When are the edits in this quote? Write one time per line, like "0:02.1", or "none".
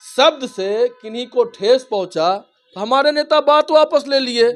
none